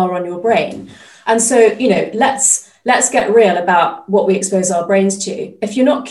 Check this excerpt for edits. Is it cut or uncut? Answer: uncut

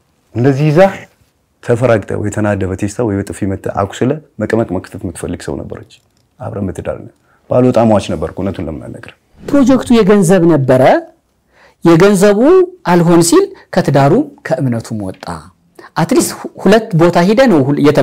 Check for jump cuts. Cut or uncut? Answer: cut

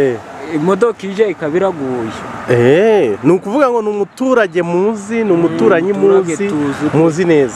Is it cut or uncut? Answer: uncut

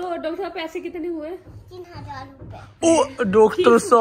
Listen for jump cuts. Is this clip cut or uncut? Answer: uncut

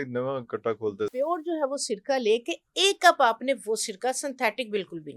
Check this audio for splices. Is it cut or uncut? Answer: cut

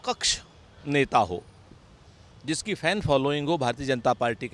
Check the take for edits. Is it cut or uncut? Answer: uncut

